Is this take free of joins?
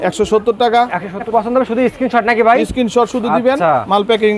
no; 1 cut; at 1.3 s

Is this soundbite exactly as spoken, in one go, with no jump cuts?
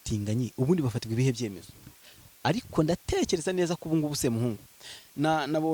yes; 0 cuts

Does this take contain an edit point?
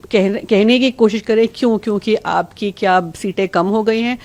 no; 0 cuts

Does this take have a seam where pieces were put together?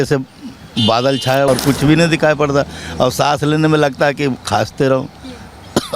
yes; 1 cut; at 1.5 s

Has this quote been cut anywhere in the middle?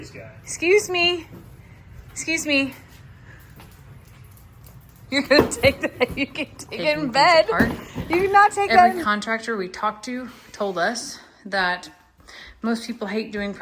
yes; 1 cut; at 9.0 s

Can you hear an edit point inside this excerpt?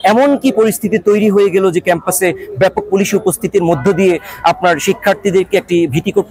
no; 0 cuts

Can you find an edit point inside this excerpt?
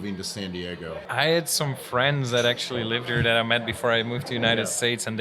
yes; 1 cut; at 1.1 s

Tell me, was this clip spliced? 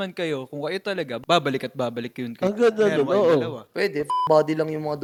no; 0 cuts

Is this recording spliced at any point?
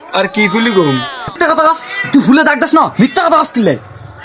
yes; 1 cut; at 1.4 s

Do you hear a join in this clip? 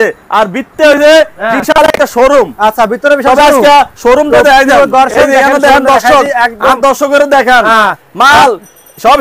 no; 0 cuts

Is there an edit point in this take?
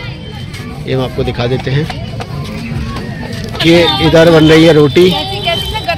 yes; 1 cut; at 3.6 s

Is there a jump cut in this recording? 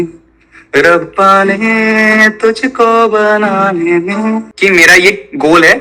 yes; 1 cut; at 4.5 s

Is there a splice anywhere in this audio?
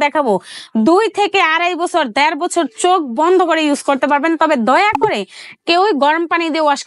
no; 0 cuts

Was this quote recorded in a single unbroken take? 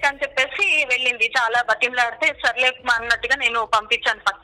yes; 0 cuts

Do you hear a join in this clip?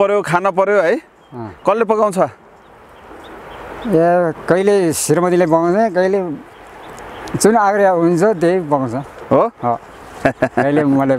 no; 0 cuts

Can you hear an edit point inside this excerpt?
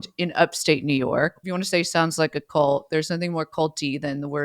yes; 1 cut; at 1.4 s

